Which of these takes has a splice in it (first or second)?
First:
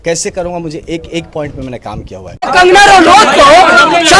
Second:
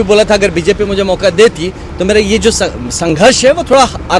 first